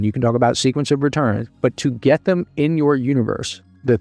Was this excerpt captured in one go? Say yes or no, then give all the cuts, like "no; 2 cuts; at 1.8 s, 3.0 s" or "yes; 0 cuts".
no; 1 cut; at 1.4 s